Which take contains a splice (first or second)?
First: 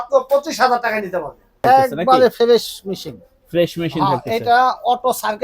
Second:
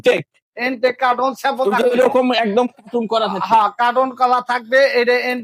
first